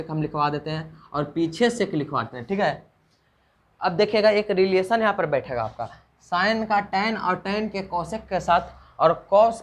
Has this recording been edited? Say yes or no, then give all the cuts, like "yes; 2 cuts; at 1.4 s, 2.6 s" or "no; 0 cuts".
no; 0 cuts